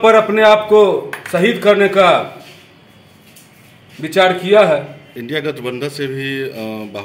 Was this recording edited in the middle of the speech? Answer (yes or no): yes